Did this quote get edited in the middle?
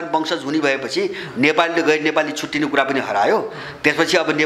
no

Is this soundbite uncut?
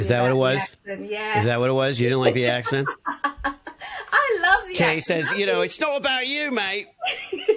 yes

